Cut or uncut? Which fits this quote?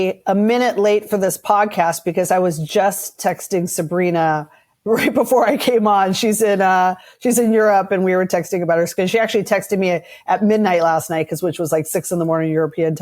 uncut